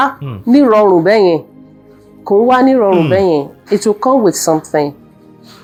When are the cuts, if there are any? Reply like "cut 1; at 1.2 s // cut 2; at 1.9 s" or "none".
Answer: none